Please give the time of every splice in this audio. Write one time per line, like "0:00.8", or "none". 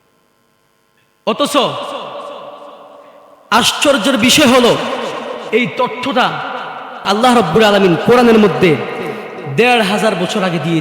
0:07.0